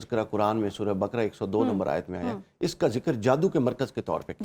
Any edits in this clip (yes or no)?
no